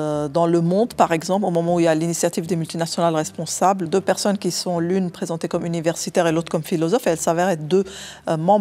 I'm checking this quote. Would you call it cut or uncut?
cut